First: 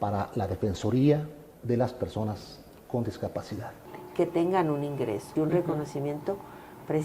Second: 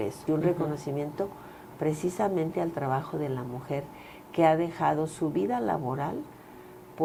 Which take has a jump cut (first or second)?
first